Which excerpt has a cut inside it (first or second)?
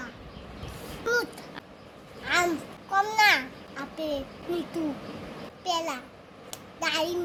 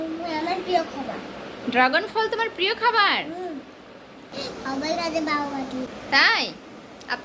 second